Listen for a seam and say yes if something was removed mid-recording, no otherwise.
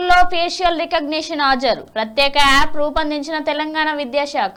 no